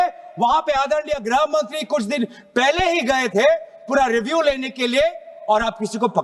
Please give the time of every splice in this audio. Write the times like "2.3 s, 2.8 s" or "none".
none